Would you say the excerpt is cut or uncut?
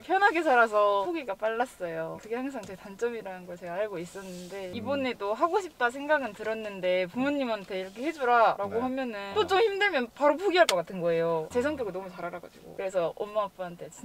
uncut